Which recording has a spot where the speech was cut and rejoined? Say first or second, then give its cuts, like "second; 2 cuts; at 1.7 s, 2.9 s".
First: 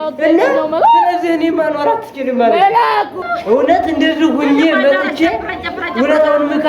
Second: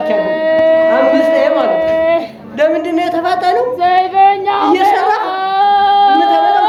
first; 1 cut; at 3.2 s